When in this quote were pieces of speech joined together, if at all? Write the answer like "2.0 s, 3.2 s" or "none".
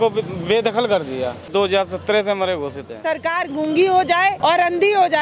1.5 s, 3.0 s, 4.4 s